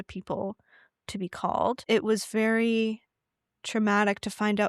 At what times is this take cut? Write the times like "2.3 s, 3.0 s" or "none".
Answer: 1.8 s